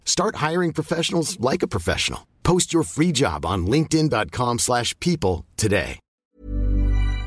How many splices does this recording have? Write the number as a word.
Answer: one